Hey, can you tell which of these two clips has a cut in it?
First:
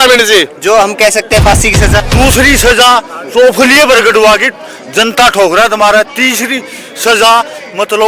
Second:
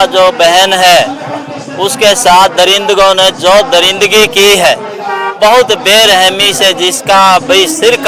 first; 1 cut; at 2.0 s

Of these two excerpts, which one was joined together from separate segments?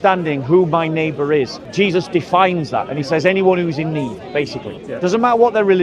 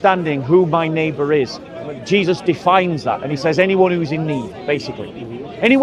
first; 2 cuts; at 1.6 s, 4.8 s

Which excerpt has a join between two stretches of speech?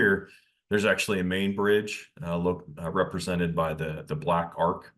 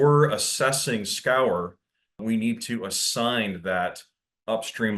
second; 1 cut; at 2.2 s

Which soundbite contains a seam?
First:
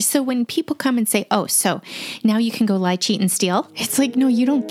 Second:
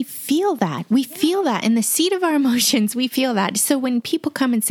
first; 1 cut; at 3.8 s

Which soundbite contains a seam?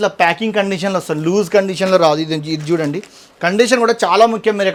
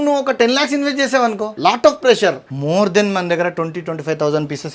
second; 2 cuts; at 1.5 s, 2.5 s

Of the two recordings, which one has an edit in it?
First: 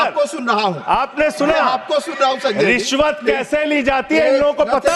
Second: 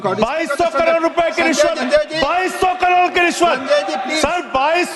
second; 2 cuts; at 1.8 s, 4.0 s

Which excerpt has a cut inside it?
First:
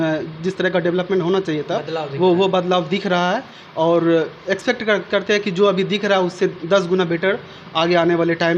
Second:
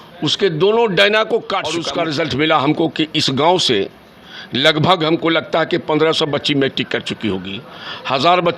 second; 1 cut; at 1.8 s

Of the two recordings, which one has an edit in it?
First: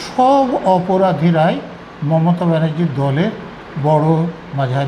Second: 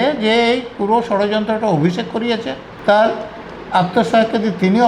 second; 1 cut; at 2.7 s

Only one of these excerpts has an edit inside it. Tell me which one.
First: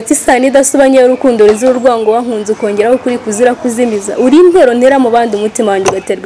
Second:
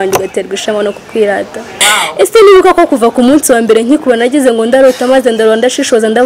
second; 1 cut; at 1.7 s

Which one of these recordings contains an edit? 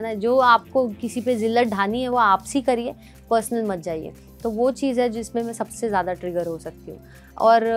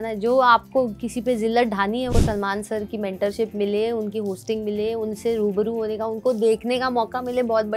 second; 1 cut; at 2.1 s

